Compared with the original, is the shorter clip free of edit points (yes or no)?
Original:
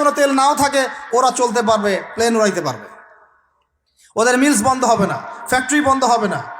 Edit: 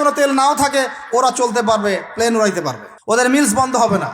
no